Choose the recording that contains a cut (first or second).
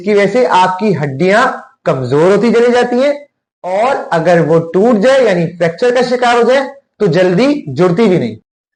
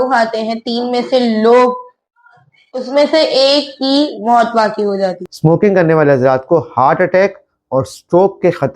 second